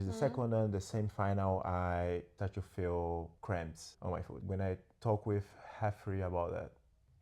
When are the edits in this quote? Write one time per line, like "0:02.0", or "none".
none